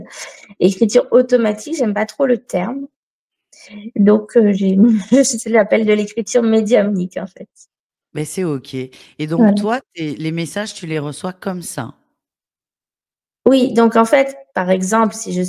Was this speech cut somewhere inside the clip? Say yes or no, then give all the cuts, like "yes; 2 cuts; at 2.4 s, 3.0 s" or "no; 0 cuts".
no; 0 cuts